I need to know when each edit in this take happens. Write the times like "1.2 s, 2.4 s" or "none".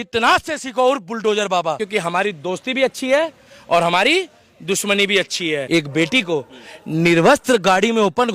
1.8 s, 5.6 s

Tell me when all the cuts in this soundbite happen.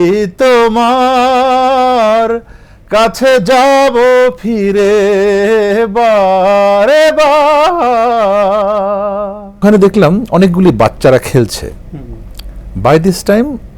9.6 s

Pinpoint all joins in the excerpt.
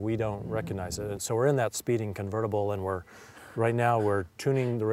1.2 s

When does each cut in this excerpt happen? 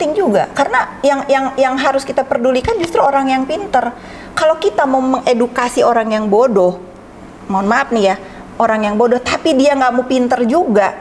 none

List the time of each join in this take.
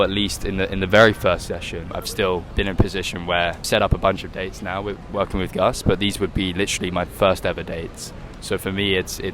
1.8 s

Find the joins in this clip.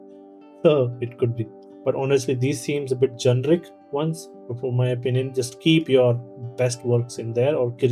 1.6 s, 4.3 s

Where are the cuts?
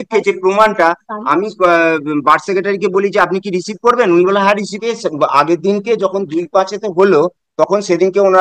4.8 s

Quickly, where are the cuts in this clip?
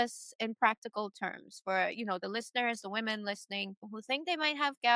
none

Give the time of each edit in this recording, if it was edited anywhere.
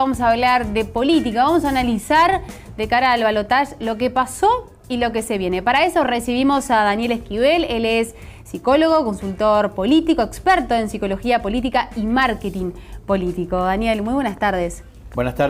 none

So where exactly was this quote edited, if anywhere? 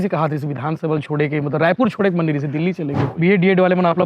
3.1 s

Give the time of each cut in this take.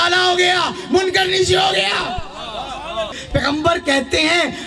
3.1 s

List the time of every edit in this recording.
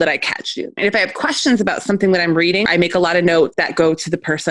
0.8 s, 2.6 s, 3.6 s

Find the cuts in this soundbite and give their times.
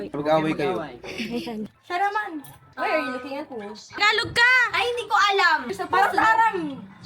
1.6 s, 4.0 s, 5.7 s

